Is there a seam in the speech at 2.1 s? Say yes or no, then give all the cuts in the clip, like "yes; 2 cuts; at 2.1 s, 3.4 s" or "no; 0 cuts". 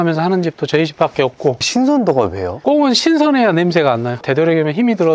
no; 1 cut; at 4.2 s